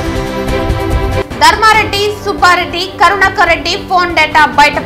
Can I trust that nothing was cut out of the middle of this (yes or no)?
no